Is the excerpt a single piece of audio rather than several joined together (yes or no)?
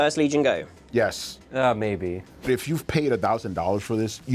no